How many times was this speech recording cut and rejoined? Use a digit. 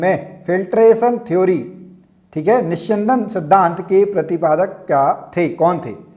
0